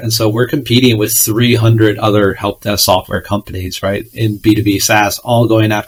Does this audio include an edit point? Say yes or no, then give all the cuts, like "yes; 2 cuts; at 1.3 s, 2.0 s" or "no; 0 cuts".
no; 0 cuts